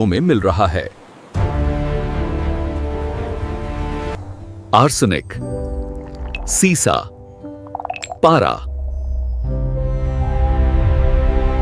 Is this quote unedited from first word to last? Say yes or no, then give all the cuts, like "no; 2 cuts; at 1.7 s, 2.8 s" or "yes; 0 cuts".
yes; 0 cuts